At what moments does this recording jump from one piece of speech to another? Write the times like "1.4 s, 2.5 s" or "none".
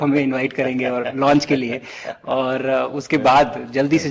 none